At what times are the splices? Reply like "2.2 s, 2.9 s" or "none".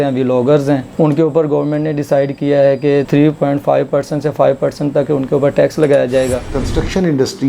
6.5 s